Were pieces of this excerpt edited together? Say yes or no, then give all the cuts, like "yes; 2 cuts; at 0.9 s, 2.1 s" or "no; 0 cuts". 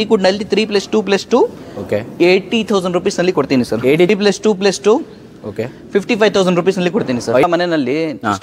yes; 2 cuts; at 4.1 s, 7.4 s